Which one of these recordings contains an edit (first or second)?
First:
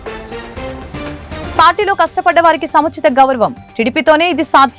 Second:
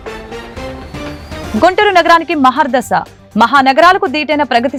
first